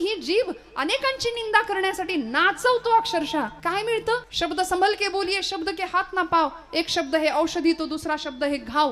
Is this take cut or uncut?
cut